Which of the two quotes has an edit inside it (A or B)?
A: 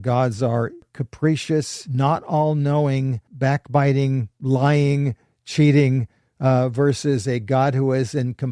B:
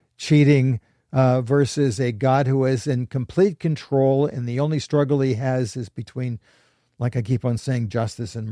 A